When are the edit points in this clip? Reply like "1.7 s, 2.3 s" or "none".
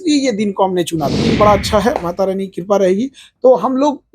1.2 s